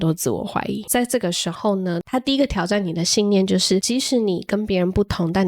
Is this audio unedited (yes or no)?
no